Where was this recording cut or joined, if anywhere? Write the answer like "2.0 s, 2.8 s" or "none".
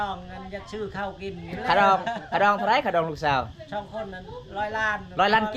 none